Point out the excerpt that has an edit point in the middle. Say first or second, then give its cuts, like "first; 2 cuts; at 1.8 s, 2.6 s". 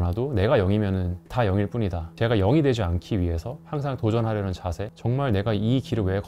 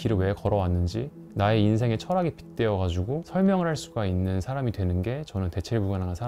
first; 2 cuts; at 1.2 s, 4.9 s